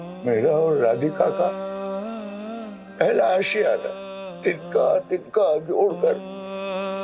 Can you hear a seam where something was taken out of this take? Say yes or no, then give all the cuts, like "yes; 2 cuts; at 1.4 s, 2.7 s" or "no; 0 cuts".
yes; 1 cut; at 4.3 s